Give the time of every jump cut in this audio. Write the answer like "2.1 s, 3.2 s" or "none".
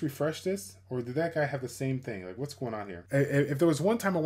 2.9 s